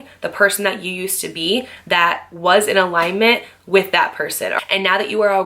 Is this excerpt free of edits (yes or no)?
no